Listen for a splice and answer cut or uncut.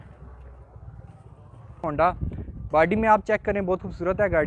cut